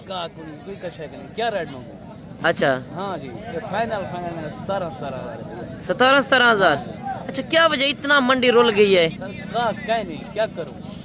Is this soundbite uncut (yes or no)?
yes